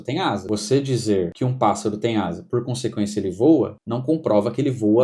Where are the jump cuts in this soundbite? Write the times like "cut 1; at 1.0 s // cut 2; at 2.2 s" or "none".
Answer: none